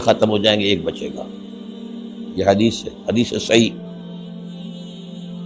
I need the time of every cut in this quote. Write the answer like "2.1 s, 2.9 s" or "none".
3.7 s